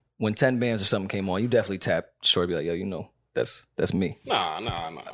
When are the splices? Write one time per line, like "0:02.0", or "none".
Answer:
0:04.2